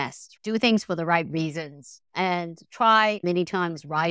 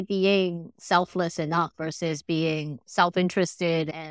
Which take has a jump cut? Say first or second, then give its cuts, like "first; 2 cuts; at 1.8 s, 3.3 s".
second; 1 cut; at 2.8 s